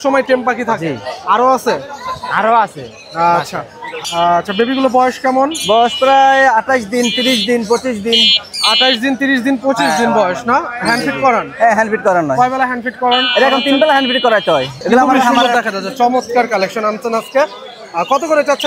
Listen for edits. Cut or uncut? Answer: cut